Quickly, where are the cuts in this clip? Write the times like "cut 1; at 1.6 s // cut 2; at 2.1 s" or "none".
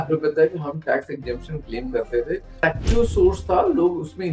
cut 1; at 2.6 s